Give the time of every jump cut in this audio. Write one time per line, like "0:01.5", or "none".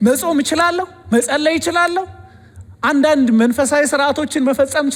none